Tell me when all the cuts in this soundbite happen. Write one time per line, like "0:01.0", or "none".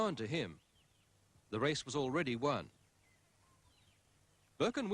0:03.9